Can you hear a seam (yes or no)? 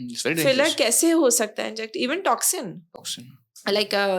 no